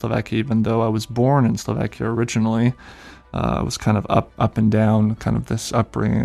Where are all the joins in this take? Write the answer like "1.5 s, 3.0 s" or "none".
4.3 s